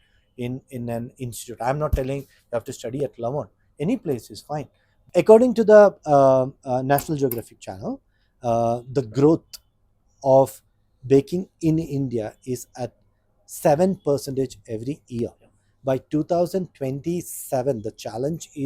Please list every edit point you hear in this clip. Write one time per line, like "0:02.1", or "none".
0:05.0